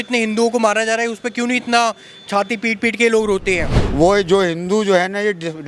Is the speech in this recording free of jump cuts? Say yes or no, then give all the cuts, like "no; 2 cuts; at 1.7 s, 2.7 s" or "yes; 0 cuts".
no; 1 cut; at 3.8 s